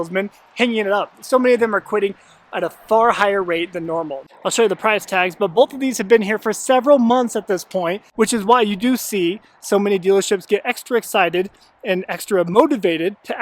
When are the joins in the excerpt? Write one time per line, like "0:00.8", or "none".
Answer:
0:04.2
0:08.0